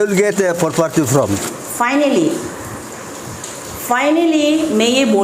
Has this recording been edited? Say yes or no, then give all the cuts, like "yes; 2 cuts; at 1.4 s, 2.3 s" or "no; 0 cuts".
yes; 1 cut; at 1.6 s